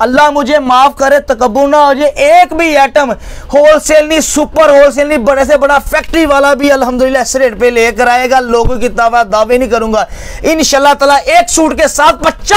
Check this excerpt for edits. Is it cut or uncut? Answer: uncut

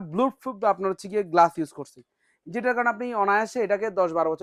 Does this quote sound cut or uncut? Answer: uncut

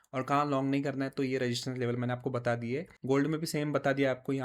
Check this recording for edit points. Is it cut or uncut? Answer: cut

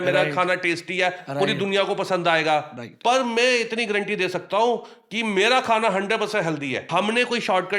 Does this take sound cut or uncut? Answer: cut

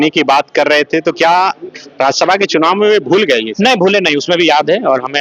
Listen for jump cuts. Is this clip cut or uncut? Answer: uncut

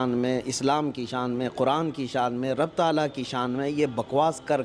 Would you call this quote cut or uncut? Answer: uncut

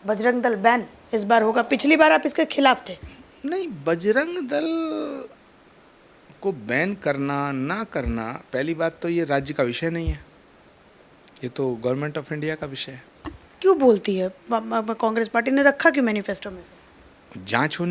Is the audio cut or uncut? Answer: uncut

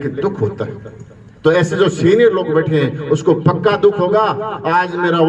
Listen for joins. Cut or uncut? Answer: uncut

